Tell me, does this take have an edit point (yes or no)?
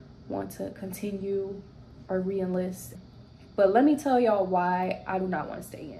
yes